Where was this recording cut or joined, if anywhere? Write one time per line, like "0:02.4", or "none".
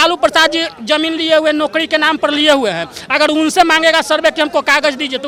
none

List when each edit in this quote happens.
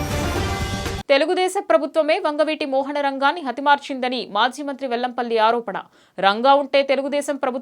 0:01.0

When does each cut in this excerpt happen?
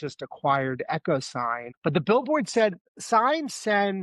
0:01.6
0:02.8

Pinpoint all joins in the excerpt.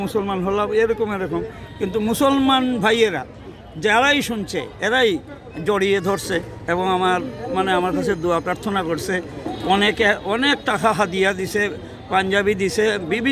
none

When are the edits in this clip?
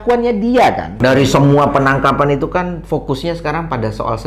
0:00.9

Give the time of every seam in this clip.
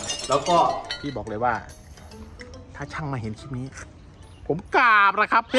0:01.0

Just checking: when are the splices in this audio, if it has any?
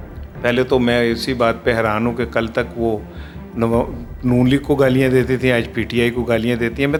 none

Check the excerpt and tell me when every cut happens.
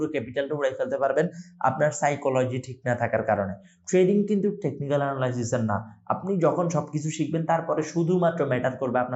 none

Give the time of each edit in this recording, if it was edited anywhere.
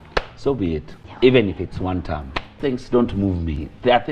0:01.0
0:02.6

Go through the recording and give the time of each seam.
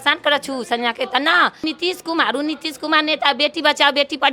0:01.6

